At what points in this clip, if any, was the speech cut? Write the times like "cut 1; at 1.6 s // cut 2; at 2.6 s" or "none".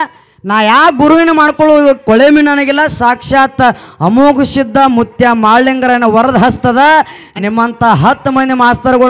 none

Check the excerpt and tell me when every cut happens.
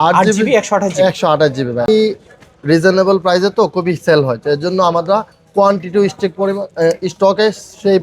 cut 1; at 1.9 s

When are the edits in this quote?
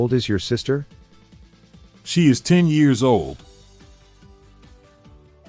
cut 1; at 3.4 s

